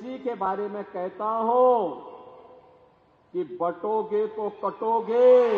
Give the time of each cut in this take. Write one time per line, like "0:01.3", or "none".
none